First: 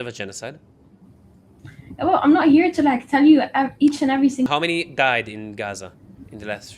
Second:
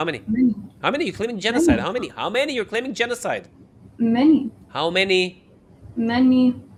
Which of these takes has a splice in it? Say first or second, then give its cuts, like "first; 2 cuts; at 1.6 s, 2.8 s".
first; 1 cut; at 4.5 s